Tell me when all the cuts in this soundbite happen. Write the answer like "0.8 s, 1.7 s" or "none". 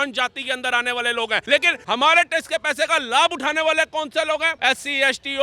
1.6 s, 4.5 s